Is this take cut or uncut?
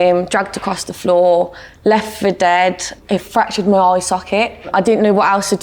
cut